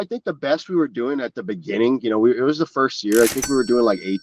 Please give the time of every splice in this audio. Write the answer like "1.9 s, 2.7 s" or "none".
none